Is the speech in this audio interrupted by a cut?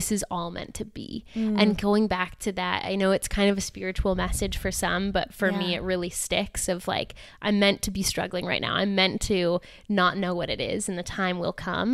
no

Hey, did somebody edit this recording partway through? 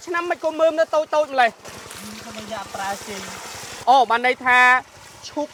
no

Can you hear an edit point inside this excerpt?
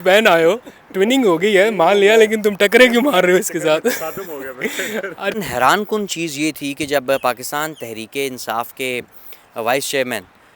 yes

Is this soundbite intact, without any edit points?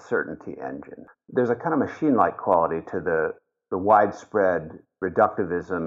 no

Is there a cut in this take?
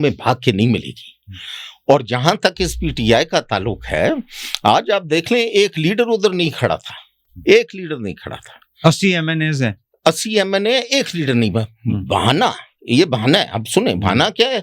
no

